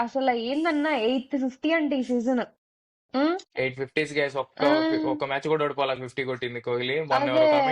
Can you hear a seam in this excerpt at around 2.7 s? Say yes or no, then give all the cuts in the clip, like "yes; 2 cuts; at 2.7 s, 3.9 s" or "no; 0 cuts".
no; 0 cuts